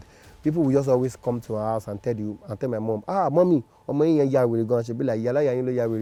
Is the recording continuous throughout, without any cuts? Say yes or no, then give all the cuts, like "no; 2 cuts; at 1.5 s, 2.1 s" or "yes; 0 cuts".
yes; 0 cuts